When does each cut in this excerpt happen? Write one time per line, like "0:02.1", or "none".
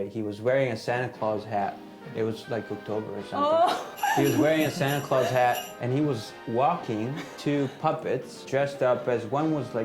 0:03.9
0:07.3
0:08.4

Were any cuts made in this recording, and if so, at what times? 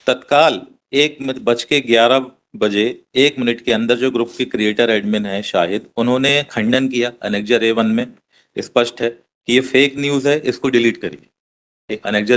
none

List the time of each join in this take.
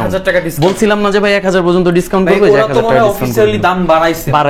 none

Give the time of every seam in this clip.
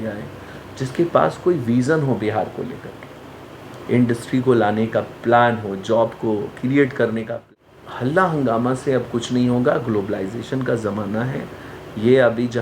0:07.5

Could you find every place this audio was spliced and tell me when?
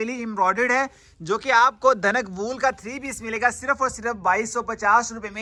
none

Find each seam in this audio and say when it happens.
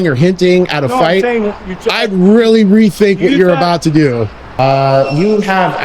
0:04.4

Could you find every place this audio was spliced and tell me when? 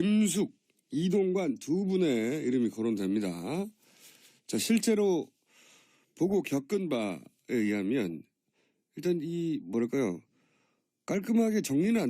0:05.5

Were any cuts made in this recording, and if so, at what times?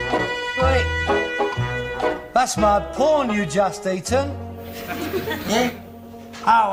0:01.6

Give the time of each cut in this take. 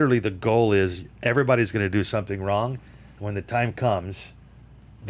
none

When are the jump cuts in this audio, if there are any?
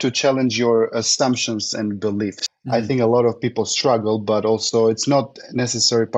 0:02.4

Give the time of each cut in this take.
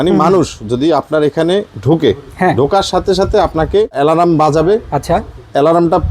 0:03.9

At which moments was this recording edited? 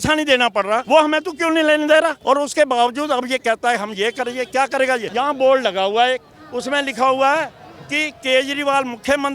0:00.8
0:02.2
0:05.1

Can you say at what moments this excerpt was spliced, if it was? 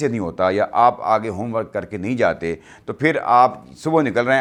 none

